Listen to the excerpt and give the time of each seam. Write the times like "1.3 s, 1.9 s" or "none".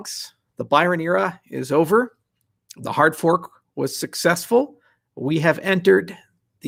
none